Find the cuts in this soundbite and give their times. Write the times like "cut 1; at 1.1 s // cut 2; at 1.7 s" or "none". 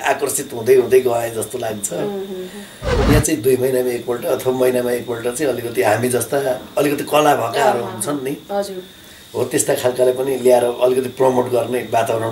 cut 1; at 2.8 s